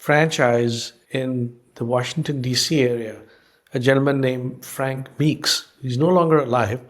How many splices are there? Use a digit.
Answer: 1